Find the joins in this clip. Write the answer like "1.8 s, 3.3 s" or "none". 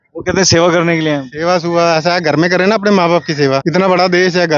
3.6 s